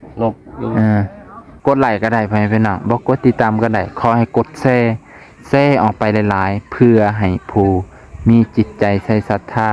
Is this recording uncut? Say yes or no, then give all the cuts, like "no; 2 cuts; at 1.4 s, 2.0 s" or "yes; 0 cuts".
no; 1 cut; at 1.5 s